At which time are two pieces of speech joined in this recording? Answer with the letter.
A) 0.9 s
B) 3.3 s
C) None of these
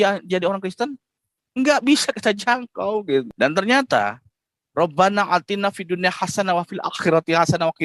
B